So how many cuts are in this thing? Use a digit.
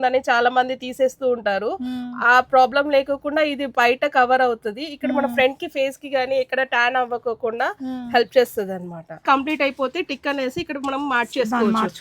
1